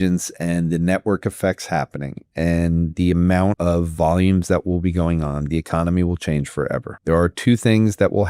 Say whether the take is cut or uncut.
cut